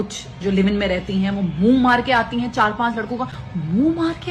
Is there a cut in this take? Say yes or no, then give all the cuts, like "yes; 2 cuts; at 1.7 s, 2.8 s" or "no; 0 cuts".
no; 0 cuts